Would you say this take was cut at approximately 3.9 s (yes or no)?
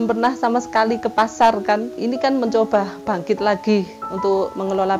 no